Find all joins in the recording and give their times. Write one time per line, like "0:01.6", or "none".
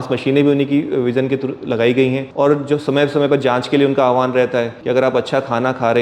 0:02.3
0:04.8